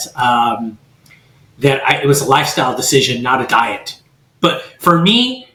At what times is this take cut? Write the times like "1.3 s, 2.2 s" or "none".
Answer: none